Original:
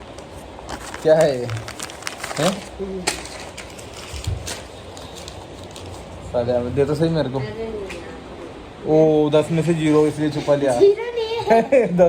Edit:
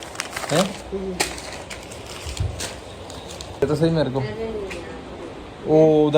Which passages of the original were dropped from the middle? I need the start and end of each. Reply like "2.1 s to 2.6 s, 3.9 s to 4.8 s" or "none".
5.5 s to 6.8 s